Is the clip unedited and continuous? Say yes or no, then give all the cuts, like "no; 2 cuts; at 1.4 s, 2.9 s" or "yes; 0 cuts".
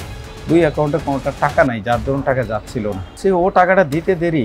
no; 1 cut; at 3.2 s